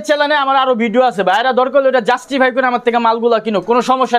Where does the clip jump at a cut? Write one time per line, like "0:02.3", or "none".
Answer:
none